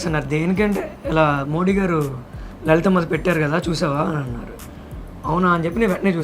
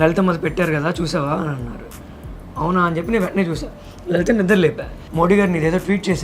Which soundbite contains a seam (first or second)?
second